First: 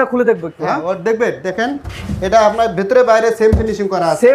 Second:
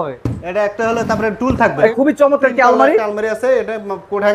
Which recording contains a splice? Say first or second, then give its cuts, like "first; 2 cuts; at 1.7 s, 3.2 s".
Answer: second; 1 cut; at 1.9 s